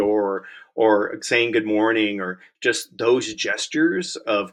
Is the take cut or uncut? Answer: uncut